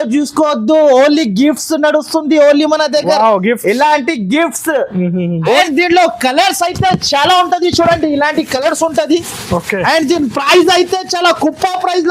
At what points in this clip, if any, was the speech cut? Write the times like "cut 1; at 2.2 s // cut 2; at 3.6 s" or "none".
cut 1; at 5.6 s